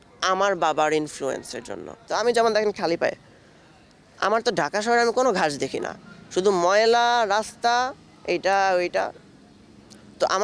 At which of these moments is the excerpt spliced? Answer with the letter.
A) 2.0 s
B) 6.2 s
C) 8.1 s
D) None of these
A